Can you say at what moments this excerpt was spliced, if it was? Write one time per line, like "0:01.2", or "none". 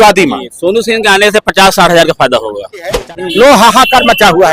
0:03.0